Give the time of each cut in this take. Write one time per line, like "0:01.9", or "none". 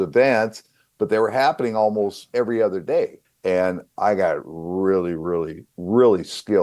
0:03.2